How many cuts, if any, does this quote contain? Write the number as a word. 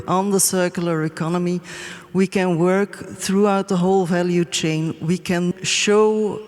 one